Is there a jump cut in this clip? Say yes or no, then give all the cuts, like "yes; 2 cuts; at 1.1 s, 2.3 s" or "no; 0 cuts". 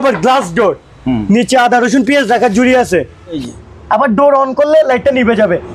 yes; 1 cut; at 3.4 s